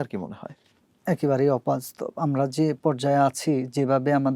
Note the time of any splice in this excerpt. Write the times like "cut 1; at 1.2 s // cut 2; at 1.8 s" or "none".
none